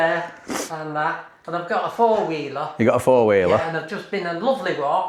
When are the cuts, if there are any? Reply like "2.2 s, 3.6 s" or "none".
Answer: none